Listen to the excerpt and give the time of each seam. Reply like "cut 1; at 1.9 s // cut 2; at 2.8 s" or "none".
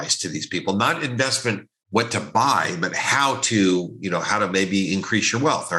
none